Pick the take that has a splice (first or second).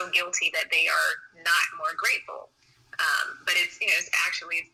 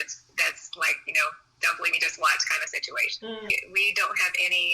second